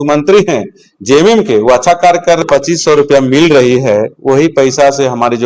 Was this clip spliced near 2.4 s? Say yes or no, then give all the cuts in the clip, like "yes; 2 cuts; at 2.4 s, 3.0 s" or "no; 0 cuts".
yes; 1 cut; at 2.4 s